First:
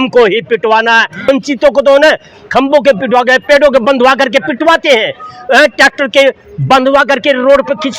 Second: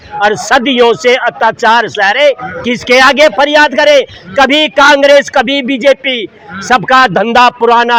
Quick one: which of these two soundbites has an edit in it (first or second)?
first